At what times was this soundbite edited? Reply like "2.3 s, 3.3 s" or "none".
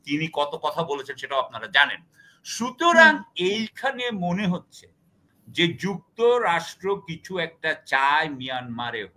none